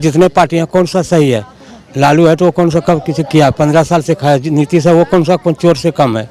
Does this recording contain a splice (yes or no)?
no